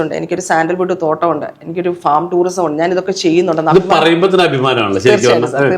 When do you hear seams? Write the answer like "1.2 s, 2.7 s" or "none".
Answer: none